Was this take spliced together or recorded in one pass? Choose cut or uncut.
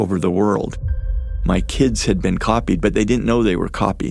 cut